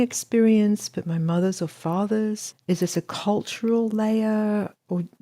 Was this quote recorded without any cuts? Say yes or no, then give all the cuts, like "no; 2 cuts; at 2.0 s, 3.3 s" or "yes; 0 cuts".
no; 1 cut; at 2.5 s